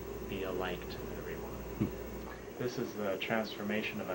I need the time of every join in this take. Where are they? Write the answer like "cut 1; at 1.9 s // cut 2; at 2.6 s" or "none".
cut 1; at 2.4 s